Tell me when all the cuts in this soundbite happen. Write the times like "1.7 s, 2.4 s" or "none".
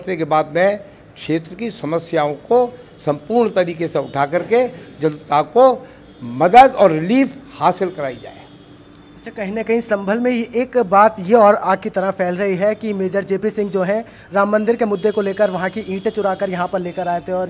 8.7 s